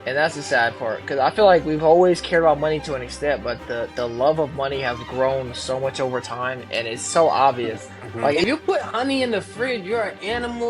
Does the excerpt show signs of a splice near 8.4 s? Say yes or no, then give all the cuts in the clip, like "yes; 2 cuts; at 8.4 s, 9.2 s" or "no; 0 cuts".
yes; 1 cut; at 8.4 s